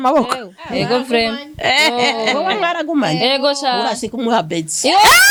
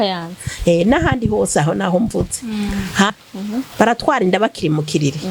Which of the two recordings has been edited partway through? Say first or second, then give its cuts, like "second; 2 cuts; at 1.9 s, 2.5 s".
second; 1 cut; at 3.1 s